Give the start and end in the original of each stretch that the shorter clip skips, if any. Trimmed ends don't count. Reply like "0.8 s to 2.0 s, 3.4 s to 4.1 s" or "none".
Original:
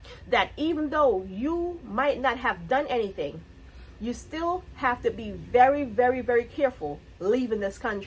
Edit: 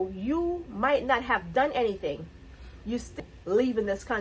4.3 s to 6.9 s